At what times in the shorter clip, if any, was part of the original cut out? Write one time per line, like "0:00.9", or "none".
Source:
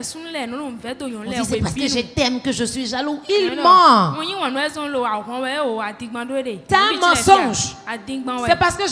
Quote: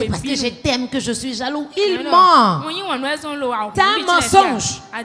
0:03.7